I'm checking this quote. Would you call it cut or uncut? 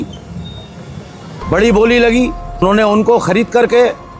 cut